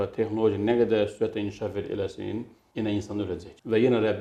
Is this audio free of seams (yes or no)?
yes